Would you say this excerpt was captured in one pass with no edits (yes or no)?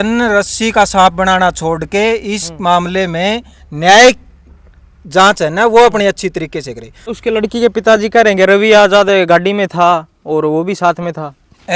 no